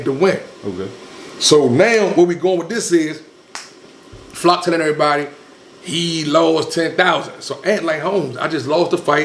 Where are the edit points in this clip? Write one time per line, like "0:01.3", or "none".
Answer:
none